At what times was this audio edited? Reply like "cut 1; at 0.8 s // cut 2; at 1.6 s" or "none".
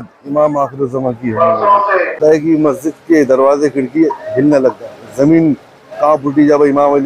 cut 1; at 2.2 s